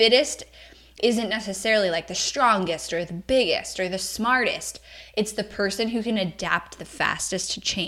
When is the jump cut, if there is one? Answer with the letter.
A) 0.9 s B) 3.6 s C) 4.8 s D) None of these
A